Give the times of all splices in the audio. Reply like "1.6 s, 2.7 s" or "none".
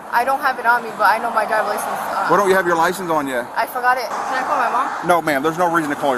4.1 s